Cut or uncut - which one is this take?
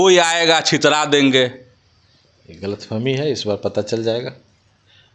uncut